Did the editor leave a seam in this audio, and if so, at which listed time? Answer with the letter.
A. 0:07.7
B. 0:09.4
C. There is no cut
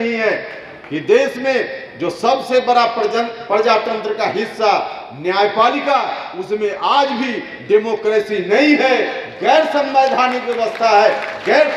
C